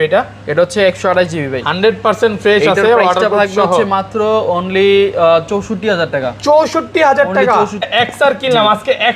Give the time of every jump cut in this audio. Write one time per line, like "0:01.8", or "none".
0:07.9